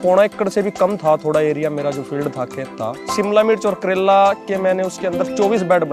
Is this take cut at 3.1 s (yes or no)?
yes